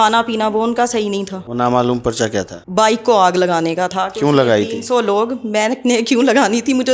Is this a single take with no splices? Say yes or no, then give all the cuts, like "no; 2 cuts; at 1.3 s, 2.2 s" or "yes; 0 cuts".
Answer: no; 2 cuts; at 1.4 s, 2.6 s